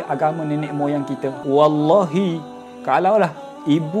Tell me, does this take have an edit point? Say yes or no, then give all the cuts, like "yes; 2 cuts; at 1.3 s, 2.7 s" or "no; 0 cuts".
yes; 1 cut; at 1.4 s